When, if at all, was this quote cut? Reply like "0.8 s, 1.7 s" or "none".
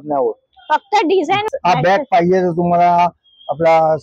1.5 s

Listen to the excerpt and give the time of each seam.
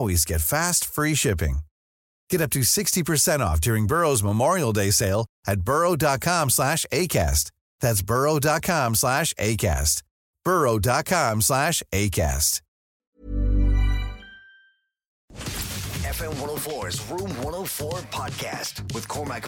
15.2 s

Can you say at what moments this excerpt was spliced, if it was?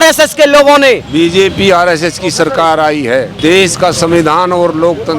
1.1 s, 3.3 s

